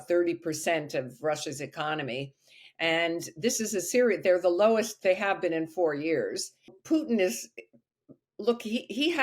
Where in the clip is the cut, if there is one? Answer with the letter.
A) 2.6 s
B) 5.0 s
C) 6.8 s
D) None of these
C